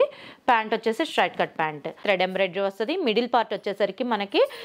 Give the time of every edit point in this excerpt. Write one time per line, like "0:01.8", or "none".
0:02.0